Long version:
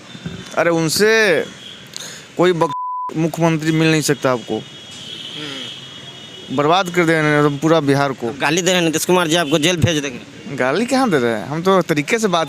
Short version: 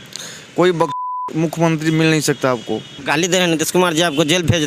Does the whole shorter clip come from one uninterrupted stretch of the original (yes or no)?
no